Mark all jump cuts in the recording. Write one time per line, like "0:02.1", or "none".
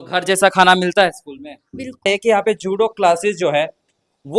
0:02.1